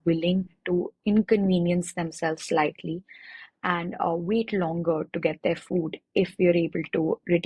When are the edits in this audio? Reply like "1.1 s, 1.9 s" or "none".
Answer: none

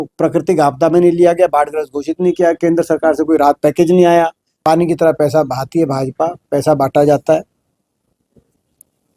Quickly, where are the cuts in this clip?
4.5 s

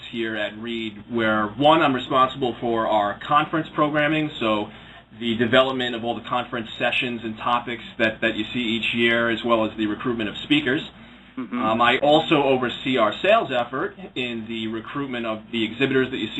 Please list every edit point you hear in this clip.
7.1 s

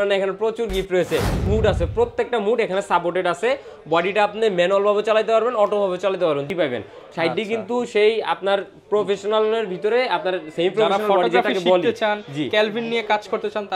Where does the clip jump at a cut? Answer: 1.5 s, 6.5 s

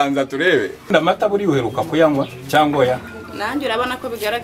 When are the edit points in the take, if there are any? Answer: 0.9 s

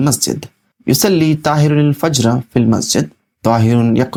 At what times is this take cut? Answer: none

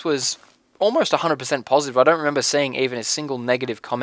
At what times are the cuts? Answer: 1.8 s

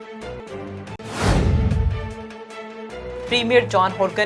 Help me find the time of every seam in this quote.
0.9 s, 3.2 s

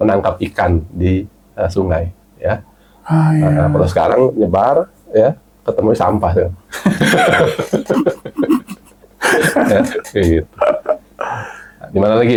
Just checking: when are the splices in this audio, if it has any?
none

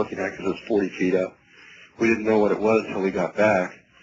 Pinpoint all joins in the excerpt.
none

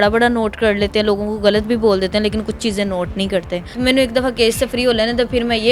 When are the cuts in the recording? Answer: 3.7 s

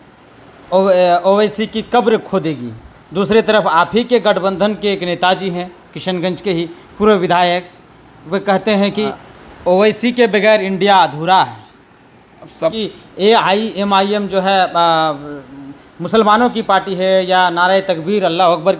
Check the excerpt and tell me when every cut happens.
9.1 s, 12.6 s

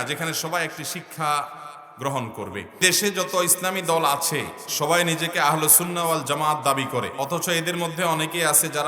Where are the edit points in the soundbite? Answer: 2.7 s, 7.1 s

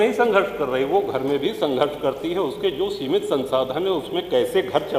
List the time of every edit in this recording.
none

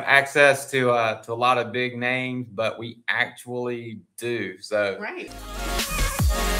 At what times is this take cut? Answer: 5.3 s

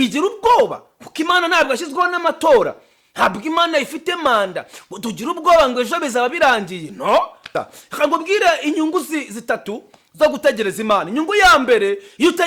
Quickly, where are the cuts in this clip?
7.6 s

